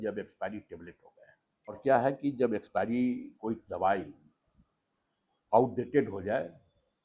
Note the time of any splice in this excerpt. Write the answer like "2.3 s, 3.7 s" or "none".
1.8 s